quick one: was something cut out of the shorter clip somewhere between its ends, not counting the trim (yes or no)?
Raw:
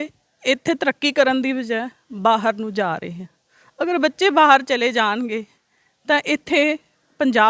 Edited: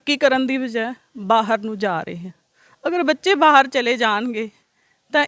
no